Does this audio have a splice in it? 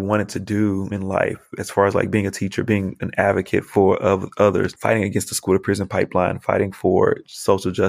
no; 0 cuts

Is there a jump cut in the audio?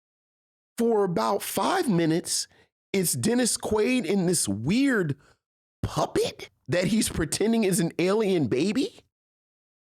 yes; 1 cut; at 6.5 s

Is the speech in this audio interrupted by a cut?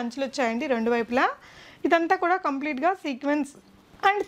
no; 0 cuts

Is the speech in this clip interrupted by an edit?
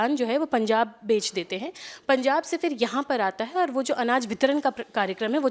no; 0 cuts

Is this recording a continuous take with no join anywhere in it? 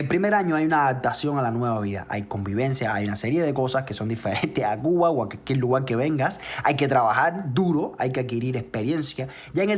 yes; 0 cuts

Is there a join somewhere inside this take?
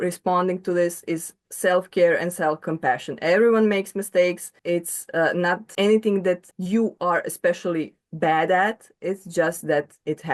yes; 4 cuts; at 2.7 s, 4.5 s, 5.7 s, 6.5 s

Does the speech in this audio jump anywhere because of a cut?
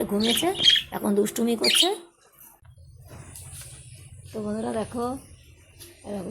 yes; 1 cut; at 2.5 s

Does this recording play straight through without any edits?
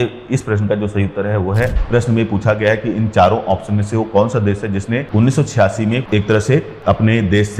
no; 3 cuts; at 1.7 s, 5.1 s, 6.7 s

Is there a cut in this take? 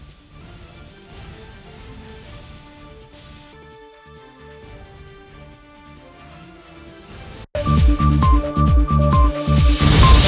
no; 0 cuts

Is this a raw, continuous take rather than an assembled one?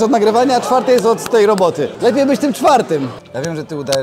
no; 2 cuts; at 1.9 s, 3.2 s

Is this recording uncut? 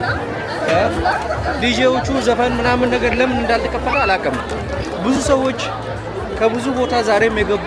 yes; 0 cuts

